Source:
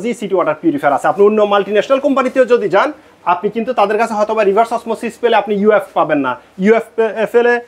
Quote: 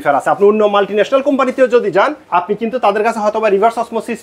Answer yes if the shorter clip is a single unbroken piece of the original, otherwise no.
no